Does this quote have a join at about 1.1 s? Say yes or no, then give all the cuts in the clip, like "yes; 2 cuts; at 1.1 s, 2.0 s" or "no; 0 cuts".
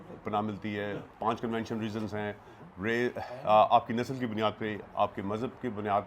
yes; 1 cut; at 1.1 s